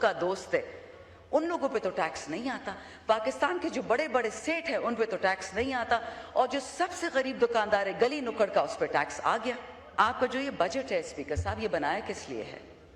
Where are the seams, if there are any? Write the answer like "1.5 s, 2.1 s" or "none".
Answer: 9.8 s